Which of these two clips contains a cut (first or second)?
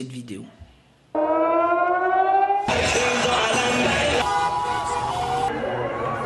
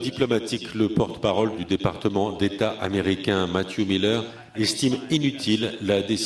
first